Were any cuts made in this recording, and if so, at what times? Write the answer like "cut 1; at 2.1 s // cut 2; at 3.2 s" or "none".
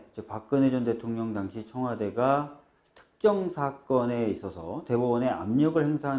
cut 1; at 3.4 s